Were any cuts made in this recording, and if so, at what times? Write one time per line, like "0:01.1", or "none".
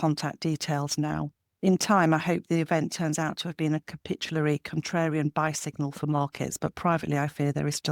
none